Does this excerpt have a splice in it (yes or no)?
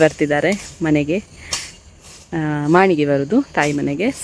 no